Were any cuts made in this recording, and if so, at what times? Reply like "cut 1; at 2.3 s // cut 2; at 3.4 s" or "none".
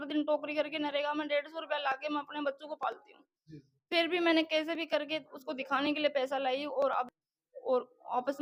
none